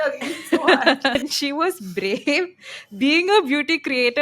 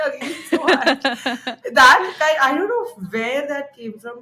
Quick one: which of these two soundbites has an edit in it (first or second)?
first